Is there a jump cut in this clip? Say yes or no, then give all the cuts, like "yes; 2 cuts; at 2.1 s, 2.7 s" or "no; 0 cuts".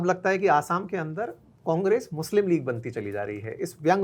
no; 0 cuts